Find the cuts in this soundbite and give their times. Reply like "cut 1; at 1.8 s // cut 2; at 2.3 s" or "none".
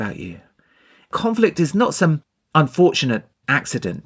cut 1; at 1.1 s